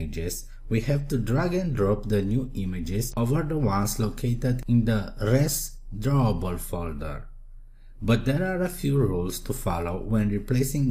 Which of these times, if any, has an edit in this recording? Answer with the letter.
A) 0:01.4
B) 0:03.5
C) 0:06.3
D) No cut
B